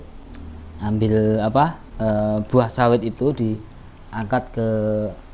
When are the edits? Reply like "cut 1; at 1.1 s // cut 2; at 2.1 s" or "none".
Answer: cut 1; at 1.9 s